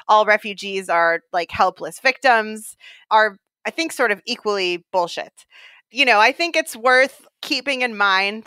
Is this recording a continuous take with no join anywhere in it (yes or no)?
no